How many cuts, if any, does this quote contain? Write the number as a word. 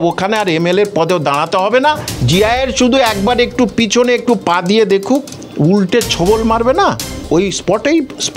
three